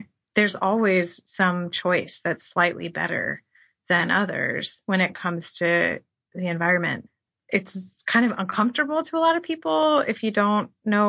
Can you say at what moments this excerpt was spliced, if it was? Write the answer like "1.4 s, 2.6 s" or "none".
7.1 s